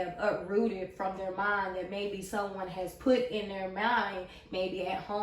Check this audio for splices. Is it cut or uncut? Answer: uncut